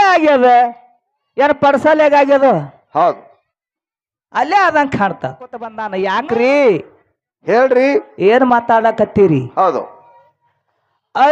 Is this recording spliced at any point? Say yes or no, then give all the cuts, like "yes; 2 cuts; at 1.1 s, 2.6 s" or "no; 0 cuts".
yes; 1 cut; at 5.8 s